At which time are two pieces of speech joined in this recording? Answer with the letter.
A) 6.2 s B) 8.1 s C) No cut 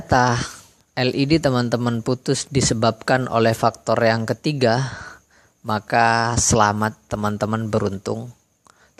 C